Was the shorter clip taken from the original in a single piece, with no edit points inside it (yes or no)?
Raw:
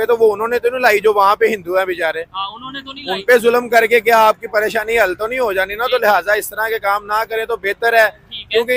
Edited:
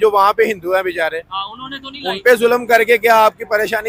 yes